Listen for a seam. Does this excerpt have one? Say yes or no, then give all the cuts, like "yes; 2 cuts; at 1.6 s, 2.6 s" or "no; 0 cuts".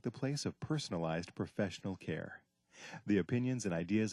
no; 0 cuts